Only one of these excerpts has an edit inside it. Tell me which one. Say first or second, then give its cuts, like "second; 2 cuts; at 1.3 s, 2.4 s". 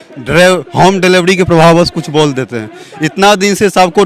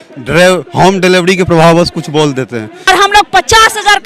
second; 1 cut; at 2.8 s